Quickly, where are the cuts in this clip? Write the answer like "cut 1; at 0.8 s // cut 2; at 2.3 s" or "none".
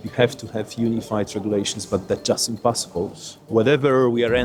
none